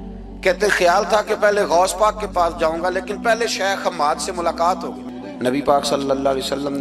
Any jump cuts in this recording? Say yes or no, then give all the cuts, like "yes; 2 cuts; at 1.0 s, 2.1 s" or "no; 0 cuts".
yes; 1 cut; at 5.0 s